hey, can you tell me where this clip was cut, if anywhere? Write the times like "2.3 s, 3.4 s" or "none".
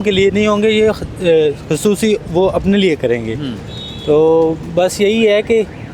none